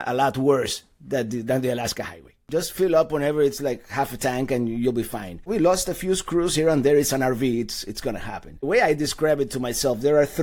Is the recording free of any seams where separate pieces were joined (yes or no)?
no